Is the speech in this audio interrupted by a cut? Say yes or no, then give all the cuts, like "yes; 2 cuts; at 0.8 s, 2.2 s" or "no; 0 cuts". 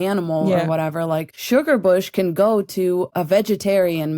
yes; 2 cuts; at 1.3 s, 3.1 s